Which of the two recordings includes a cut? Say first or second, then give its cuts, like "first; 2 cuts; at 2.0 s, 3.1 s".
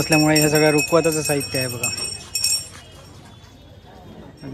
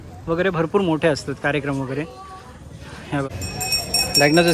second; 1 cut; at 3.3 s